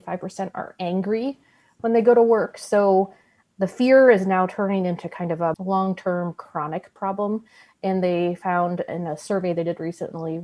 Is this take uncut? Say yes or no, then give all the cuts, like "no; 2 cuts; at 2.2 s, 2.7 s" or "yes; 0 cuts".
yes; 0 cuts